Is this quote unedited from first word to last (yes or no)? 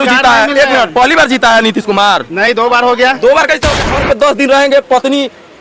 no